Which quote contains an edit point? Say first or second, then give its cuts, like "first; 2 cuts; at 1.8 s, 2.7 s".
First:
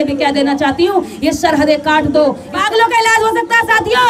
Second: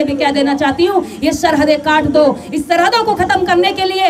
first; 1 cut; at 2.5 s